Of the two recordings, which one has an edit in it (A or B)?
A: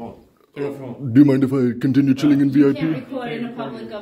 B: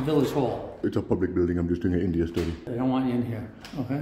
B